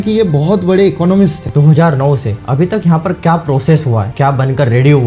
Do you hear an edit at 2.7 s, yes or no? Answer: no